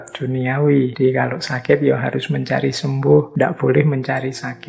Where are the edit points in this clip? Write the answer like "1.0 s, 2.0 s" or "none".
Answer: 0.9 s, 3.3 s